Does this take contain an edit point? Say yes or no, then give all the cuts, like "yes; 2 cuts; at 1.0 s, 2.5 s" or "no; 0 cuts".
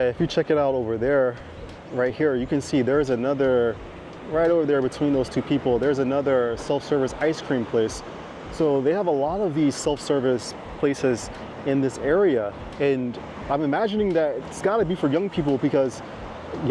no; 0 cuts